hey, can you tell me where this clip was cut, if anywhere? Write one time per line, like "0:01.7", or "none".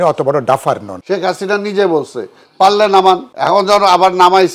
0:00.9
0:03.3

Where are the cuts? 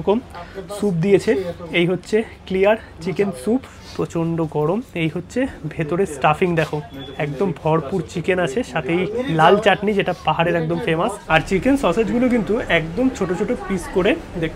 0:03.7
0:11.2

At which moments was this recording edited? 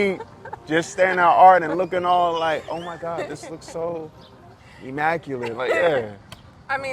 none

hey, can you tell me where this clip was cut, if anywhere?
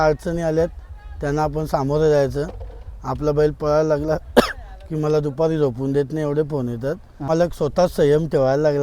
0:07.3

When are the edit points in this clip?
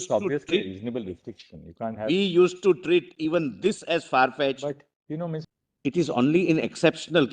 0:05.5

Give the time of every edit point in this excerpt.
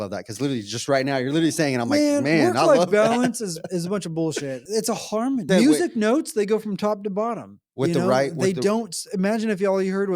0:04.6
0:05.5

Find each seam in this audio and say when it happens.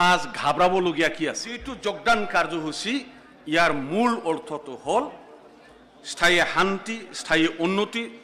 0:01.7

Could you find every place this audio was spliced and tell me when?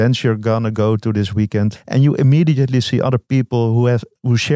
0:01.8

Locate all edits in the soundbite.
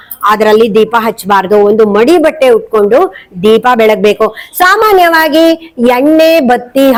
none

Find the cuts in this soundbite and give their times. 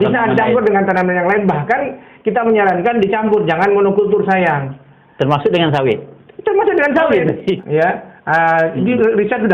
0:07.6

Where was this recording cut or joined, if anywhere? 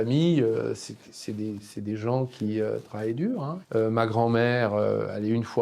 0:03.6

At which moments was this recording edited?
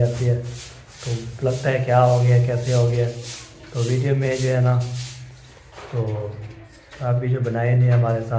none

